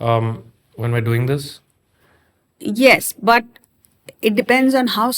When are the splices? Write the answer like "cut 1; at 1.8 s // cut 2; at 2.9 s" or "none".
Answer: none